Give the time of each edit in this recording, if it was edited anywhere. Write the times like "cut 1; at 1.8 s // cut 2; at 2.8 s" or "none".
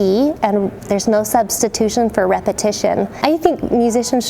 cut 1; at 3.1 s